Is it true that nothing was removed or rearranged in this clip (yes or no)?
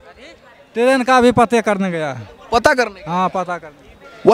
yes